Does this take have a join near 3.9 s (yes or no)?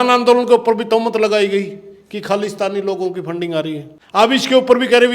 yes